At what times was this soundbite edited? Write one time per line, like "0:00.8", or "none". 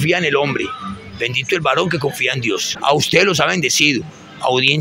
0:02.7